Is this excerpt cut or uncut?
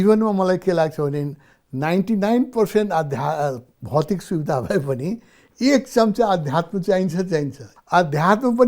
cut